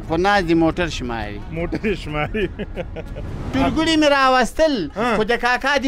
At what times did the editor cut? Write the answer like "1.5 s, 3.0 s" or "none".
3.5 s